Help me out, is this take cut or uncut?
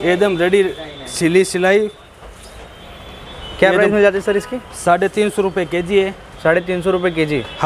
uncut